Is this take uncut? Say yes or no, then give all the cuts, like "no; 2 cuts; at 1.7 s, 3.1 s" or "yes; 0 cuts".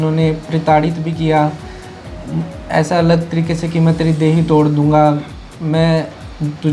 yes; 0 cuts